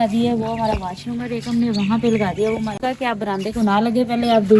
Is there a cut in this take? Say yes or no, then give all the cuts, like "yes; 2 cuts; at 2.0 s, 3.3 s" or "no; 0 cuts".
yes; 1 cut; at 2.8 s